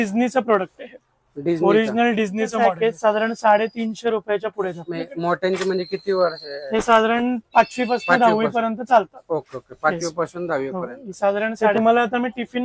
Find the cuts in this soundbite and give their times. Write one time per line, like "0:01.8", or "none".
0:02.6
0:11.7